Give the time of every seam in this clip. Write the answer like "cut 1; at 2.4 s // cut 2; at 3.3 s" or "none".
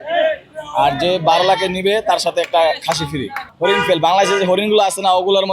cut 1; at 3.4 s